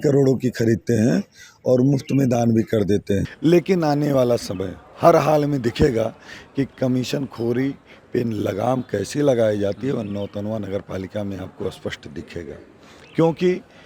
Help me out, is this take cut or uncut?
cut